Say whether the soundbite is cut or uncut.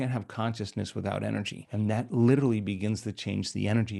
cut